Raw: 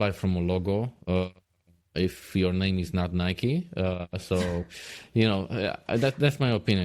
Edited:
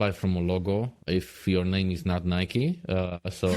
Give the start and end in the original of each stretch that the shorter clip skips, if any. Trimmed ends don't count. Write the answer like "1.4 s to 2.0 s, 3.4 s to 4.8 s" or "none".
0.9 s to 1.8 s